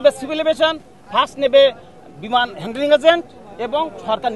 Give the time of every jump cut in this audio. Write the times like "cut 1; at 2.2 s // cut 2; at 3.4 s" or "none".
none